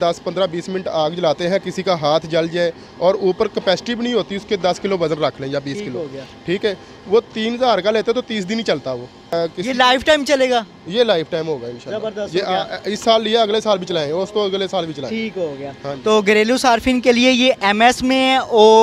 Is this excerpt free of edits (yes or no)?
yes